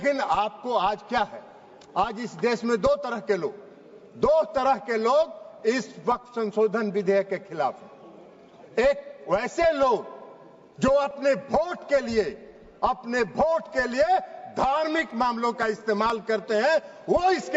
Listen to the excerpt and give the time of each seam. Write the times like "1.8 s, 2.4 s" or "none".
none